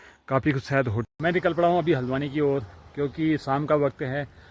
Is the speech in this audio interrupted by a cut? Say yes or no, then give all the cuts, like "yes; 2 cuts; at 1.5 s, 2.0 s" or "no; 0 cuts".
yes; 1 cut; at 1.0 s